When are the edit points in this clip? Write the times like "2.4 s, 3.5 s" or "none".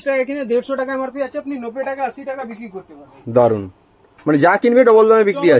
none